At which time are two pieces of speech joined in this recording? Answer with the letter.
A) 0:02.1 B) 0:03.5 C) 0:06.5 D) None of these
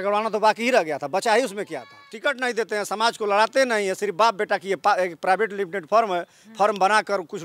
A